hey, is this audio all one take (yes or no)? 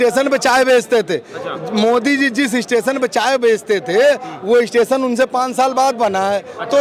yes